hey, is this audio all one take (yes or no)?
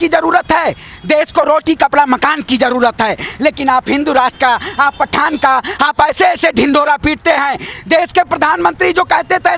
yes